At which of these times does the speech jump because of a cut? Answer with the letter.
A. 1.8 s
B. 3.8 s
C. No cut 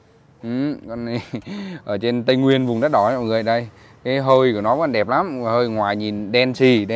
C